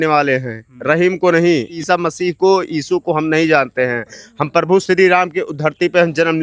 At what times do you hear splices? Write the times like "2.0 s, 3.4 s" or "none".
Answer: none